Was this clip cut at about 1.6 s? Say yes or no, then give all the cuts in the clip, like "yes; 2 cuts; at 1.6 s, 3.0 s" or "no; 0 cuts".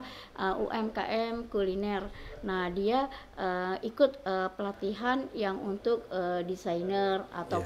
no; 0 cuts